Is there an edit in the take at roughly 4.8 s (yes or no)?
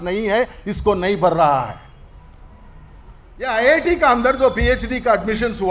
no